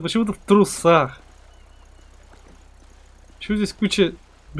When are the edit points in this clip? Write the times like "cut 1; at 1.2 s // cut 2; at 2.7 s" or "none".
none